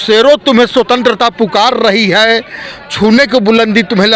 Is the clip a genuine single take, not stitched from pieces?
yes; 0 cuts

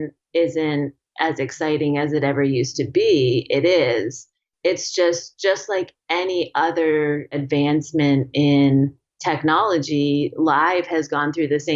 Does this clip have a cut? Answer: yes; 1 cut; at 7.4 s

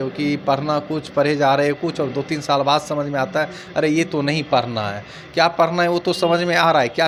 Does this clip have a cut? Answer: no; 0 cuts

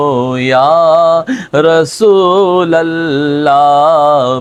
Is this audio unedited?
yes; 0 cuts

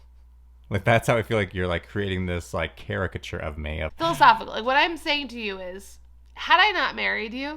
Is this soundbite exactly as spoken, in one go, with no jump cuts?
no; 1 cut; at 3.8 s

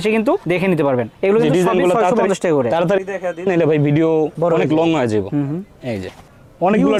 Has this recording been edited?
no; 0 cuts

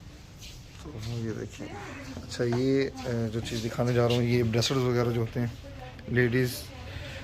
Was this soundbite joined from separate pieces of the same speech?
no; 0 cuts

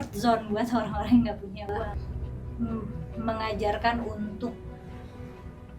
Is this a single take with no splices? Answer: no; 1 cut; at 2.0 s

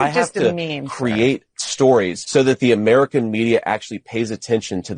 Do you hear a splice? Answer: yes; 1 cut; at 2.2 s

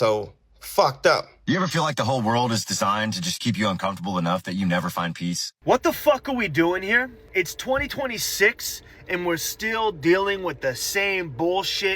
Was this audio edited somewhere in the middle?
yes; 3 cuts; at 1.3 s, 5.5 s, 7.2 s

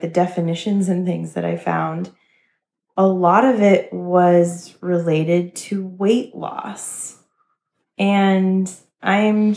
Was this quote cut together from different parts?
no; 0 cuts

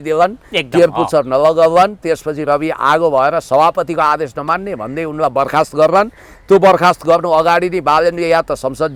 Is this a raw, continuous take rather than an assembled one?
yes; 0 cuts

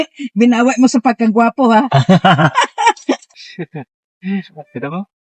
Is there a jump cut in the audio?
yes; 1 cut; at 3.4 s

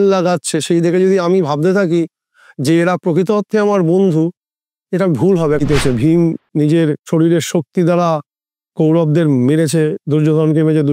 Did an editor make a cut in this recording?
yes; 2 cuts; at 5.6 s, 7.0 s

